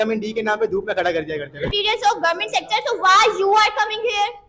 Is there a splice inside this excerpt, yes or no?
yes